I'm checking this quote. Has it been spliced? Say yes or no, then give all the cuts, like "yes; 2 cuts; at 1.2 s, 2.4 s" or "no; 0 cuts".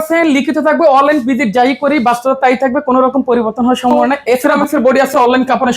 yes; 1 cut; at 4.5 s